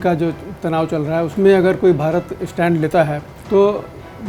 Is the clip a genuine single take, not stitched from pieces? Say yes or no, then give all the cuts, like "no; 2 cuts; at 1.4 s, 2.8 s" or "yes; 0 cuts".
no; 2 cuts; at 1.3 s, 3.3 s